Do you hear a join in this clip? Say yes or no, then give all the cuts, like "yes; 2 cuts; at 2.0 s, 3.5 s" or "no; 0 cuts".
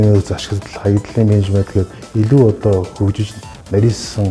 no; 0 cuts